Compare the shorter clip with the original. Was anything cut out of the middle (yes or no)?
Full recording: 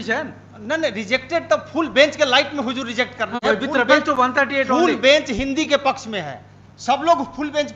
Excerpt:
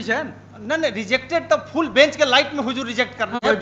no